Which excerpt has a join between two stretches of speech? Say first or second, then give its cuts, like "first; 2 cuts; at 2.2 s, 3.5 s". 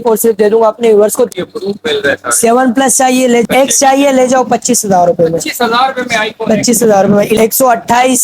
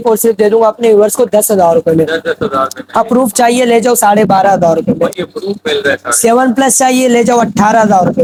first; 3 cuts; at 1.3 s, 3.5 s, 7.4 s